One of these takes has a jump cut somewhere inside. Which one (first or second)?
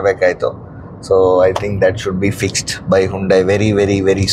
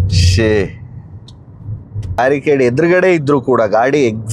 second